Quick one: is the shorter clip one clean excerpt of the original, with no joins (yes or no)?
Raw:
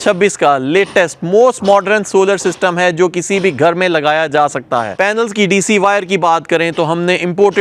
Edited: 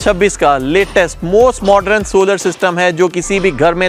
yes